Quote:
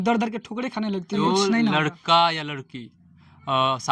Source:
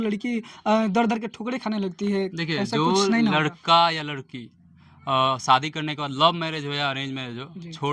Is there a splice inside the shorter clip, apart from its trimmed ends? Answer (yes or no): yes